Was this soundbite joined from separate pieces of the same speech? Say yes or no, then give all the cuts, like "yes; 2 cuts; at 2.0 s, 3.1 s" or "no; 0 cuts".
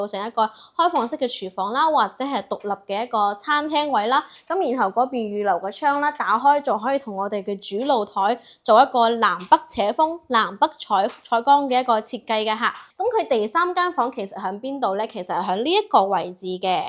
yes; 1 cut; at 12.8 s